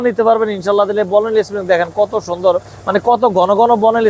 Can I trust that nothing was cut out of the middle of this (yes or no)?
yes